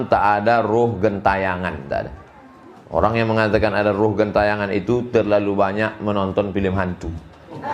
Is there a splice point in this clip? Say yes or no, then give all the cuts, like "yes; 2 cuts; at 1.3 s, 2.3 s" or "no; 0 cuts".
no; 0 cuts